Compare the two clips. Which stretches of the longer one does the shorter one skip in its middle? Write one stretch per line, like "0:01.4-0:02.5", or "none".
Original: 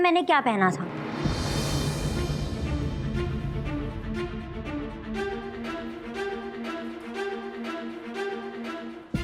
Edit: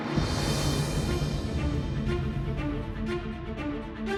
none